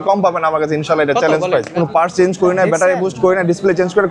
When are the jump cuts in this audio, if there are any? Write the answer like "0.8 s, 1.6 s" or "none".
1.7 s